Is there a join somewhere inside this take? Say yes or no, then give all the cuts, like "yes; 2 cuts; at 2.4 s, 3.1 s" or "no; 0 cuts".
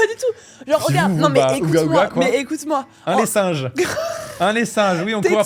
no; 0 cuts